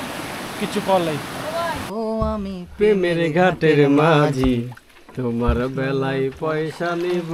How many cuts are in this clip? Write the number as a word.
one